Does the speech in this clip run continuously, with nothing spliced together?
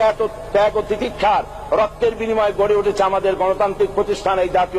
yes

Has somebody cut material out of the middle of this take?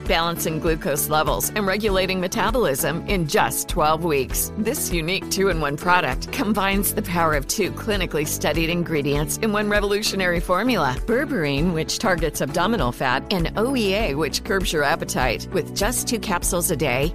no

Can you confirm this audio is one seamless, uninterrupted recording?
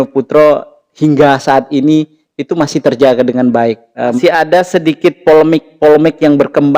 no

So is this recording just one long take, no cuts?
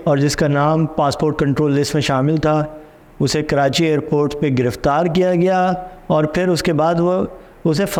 yes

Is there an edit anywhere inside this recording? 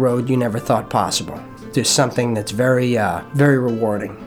yes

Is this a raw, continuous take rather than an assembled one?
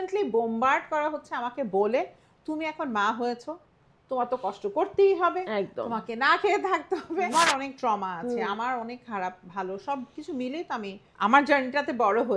no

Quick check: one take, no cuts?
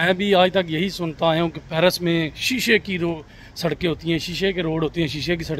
yes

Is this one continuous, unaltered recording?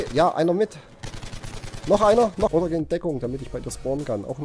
no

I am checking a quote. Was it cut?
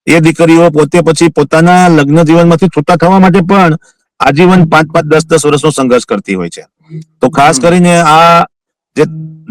no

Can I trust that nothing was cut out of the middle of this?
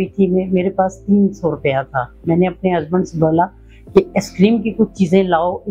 yes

